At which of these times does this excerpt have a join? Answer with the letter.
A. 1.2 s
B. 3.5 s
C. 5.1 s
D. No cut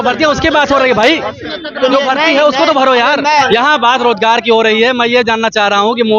B